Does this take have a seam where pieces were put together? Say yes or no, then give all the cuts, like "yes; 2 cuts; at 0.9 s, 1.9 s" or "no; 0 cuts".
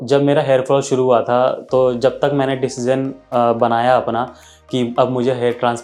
no; 0 cuts